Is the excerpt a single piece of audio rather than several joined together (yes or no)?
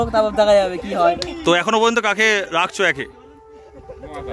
yes